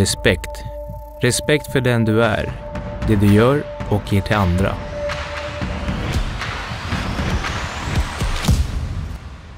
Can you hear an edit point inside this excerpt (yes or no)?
no